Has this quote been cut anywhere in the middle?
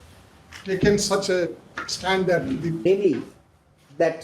yes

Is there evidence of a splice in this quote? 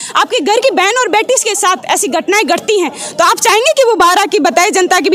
no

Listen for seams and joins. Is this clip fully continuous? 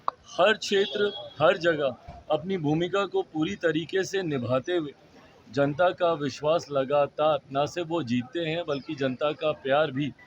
yes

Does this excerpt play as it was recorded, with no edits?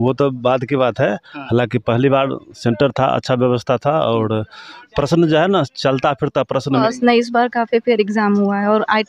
no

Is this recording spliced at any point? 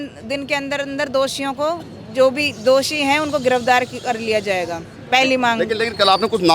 no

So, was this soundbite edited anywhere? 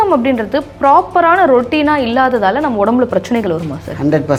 no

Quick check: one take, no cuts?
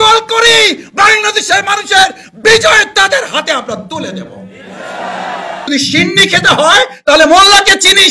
no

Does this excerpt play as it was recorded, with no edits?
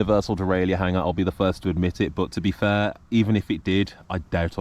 yes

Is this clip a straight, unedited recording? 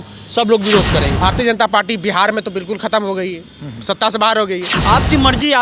no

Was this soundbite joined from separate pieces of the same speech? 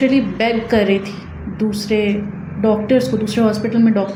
no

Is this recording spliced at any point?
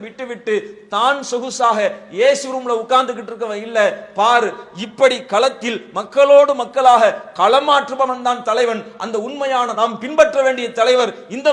no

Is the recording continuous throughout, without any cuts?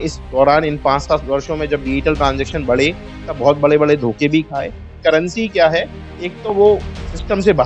no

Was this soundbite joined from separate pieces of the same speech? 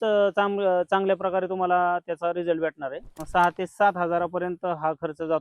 yes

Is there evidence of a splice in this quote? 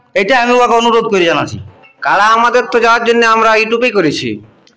yes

